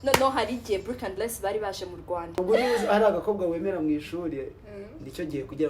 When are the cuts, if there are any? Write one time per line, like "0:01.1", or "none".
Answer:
0:02.4

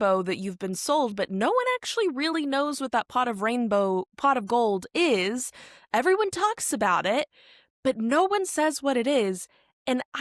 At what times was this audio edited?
none

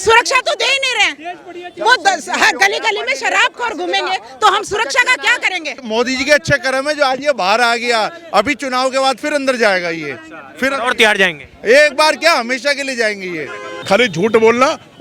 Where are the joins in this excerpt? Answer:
0:05.8
0:13.7

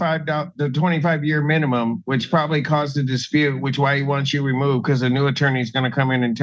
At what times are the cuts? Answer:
none

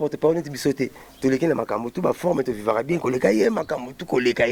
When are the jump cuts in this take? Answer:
none

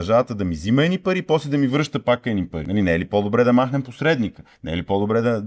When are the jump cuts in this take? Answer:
0:02.6

